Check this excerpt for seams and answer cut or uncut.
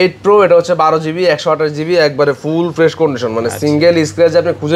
uncut